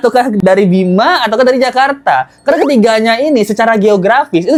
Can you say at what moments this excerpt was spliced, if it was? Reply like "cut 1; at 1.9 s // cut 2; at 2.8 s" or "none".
none